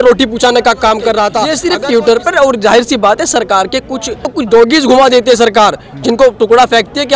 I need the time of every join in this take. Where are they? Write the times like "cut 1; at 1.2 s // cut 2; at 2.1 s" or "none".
cut 1; at 1.5 s // cut 2; at 4.3 s